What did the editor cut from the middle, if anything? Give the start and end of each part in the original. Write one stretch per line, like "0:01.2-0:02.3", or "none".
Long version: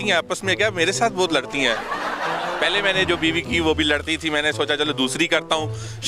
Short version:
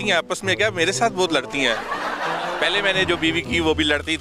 none